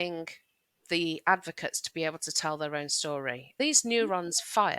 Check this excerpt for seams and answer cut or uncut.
cut